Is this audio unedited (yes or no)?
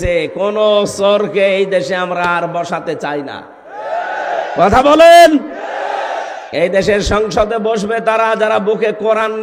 yes